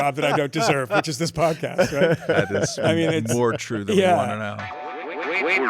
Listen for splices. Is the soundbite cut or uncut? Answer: cut